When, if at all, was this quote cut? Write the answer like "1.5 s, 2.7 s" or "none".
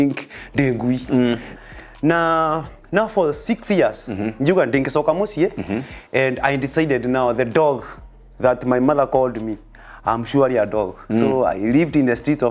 1.5 s